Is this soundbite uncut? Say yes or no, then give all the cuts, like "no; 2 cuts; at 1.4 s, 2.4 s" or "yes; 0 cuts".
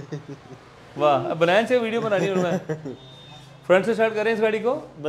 yes; 0 cuts